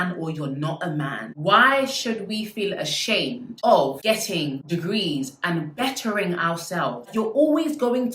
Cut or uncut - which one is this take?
cut